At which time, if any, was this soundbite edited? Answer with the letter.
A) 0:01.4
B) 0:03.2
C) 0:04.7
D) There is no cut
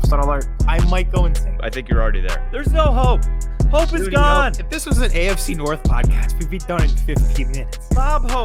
D